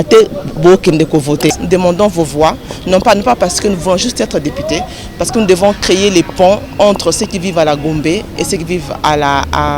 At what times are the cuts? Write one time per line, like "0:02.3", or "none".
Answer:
0:01.6